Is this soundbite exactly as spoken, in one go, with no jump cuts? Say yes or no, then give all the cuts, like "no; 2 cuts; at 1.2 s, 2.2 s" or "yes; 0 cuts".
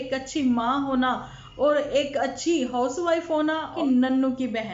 no; 1 cut; at 3.8 s